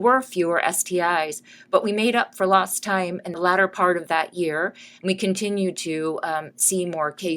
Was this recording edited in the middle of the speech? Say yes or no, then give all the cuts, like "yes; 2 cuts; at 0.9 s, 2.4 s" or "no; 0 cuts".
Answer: yes; 1 cut; at 3.3 s